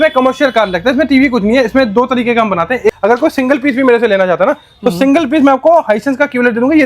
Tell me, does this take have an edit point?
yes; 1 cut; at 3.0 s

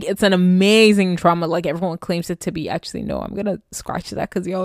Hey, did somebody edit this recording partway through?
no; 0 cuts

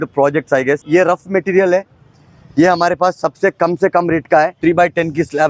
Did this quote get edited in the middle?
yes; 2 cuts; at 0.8 s, 4.5 s

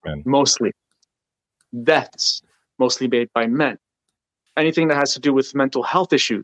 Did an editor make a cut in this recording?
yes; 1 cut; at 4.5 s

